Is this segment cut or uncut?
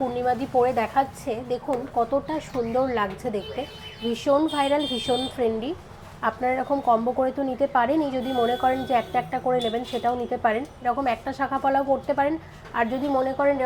uncut